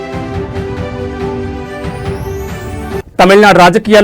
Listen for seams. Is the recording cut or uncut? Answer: cut